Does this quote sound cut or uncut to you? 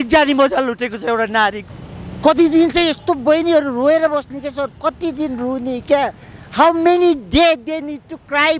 cut